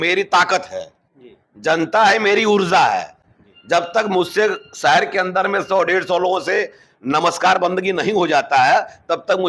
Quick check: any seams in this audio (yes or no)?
no